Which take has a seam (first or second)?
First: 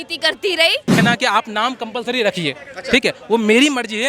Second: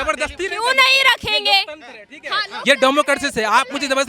first